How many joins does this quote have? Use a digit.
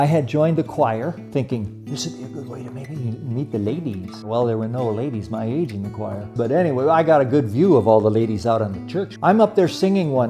4